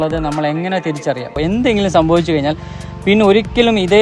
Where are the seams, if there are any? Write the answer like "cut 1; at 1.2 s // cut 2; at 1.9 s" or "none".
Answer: cut 1; at 1.4 s